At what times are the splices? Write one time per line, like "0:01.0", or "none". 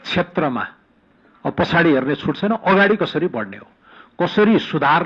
none